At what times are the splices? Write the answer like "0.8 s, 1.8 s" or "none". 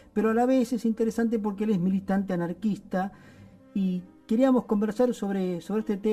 none